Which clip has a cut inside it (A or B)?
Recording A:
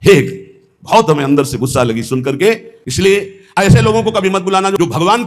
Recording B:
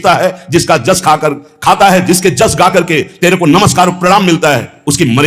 A